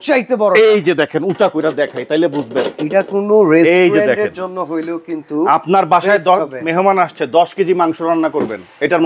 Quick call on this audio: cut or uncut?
uncut